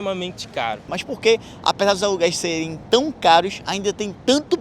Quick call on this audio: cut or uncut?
cut